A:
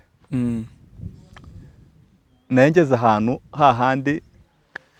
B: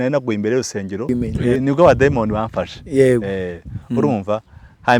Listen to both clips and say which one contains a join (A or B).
B